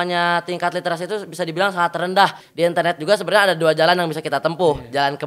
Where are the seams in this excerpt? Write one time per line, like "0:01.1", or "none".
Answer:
0:02.4